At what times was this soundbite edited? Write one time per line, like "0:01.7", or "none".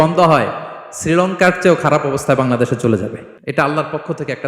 0:03.3

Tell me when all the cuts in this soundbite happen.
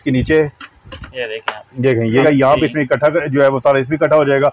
0:02.2

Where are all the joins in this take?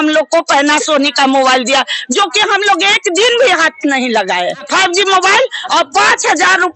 0:04.6

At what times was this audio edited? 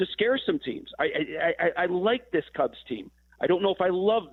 none

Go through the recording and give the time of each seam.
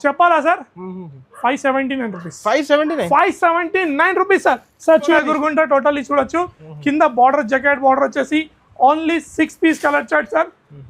0:05.2

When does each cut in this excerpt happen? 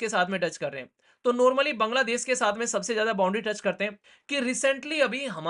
0:04.0

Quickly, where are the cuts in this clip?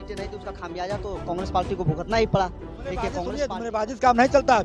0:03.3

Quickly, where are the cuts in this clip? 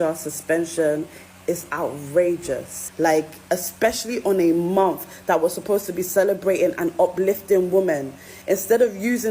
0:02.8

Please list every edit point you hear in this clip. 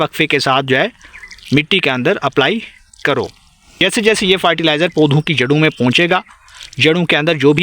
0:03.8

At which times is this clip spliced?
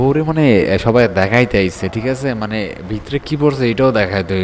none

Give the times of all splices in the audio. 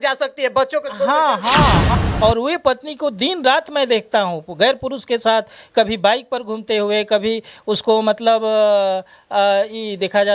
0:01.9

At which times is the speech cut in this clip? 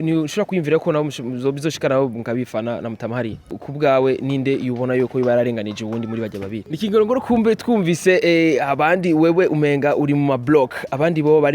0:03.6
0:06.6

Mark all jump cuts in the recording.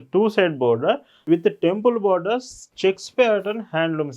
0:01.1

